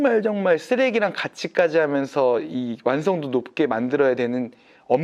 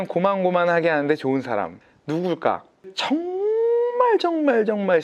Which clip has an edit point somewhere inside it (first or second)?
second